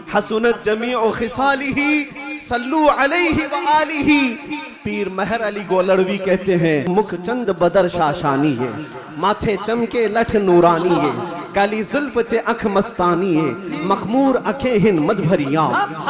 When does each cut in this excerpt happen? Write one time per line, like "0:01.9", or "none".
0:06.9